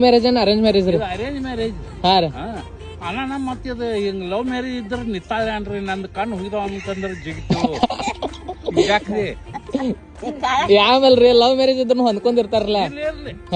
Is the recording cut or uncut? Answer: uncut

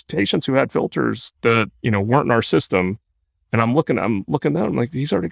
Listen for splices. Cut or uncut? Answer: uncut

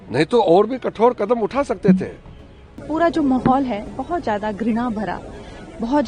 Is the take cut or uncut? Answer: cut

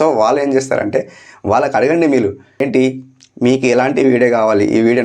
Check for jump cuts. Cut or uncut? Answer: cut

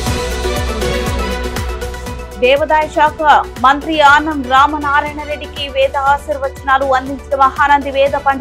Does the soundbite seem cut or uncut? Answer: cut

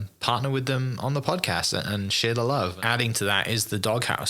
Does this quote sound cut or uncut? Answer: cut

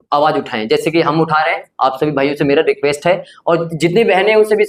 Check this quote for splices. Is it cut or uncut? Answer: uncut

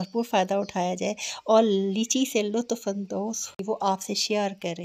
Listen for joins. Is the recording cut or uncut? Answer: cut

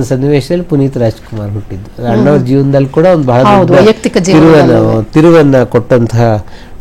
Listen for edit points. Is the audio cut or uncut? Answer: uncut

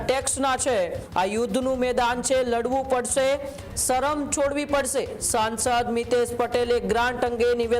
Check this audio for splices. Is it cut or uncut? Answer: cut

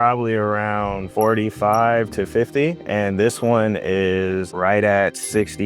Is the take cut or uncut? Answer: cut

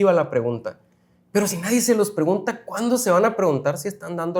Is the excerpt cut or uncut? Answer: uncut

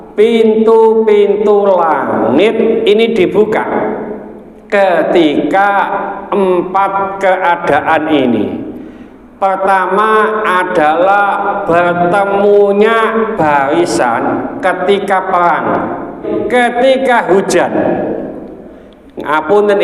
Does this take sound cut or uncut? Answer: cut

